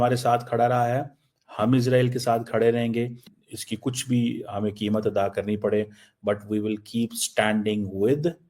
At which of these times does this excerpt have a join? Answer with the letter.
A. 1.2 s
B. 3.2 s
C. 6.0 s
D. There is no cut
B